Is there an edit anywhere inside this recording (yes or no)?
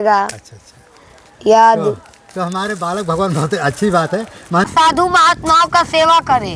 yes